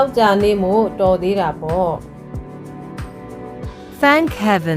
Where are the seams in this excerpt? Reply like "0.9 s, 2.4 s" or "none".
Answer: 2.0 s, 3.6 s